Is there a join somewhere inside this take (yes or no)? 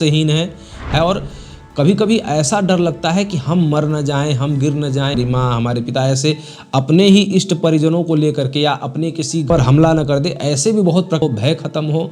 yes